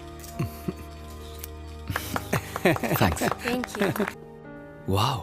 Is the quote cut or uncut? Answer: cut